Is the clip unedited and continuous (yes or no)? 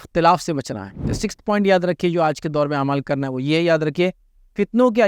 no